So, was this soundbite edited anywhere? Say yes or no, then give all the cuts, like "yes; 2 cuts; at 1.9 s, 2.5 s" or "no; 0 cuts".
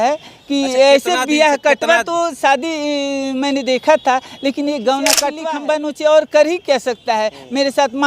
yes; 1 cut; at 5.4 s